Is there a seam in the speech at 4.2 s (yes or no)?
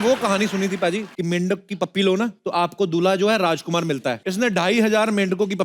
yes